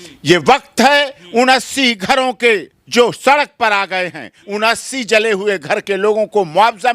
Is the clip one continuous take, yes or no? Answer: no